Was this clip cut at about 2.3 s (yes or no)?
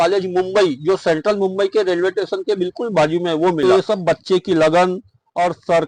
no